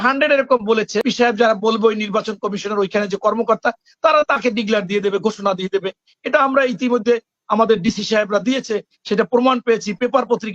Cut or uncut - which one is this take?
cut